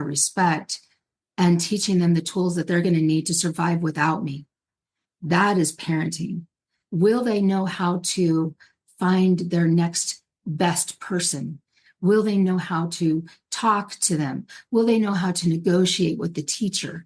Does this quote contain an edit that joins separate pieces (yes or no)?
yes